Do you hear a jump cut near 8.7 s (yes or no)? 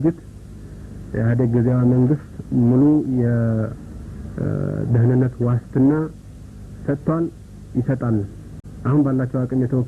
yes